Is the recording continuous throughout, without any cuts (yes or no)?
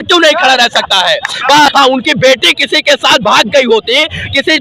no